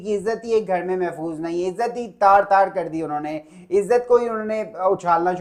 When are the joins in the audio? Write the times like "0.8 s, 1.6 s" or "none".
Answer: none